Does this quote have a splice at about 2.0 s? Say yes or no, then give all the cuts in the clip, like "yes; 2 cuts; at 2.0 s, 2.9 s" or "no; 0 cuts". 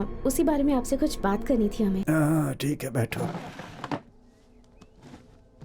yes; 1 cut; at 2.0 s